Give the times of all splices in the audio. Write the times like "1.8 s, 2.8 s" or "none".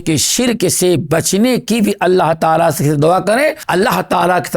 3.6 s